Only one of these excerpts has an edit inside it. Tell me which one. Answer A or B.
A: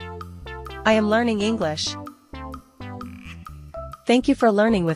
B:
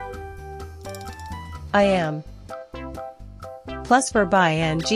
A